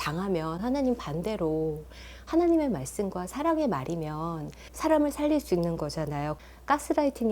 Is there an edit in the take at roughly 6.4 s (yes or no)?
yes